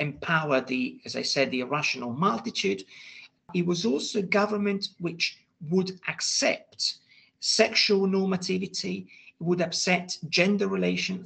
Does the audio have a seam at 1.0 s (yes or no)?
no